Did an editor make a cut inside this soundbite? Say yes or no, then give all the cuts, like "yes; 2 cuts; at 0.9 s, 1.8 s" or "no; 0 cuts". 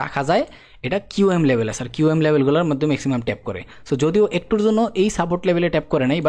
no; 0 cuts